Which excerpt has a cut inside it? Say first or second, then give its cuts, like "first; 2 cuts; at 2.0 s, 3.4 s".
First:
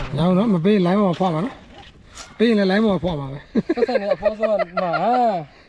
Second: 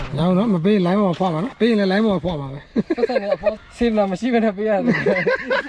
second; 2 cuts; at 1.5 s, 3.6 s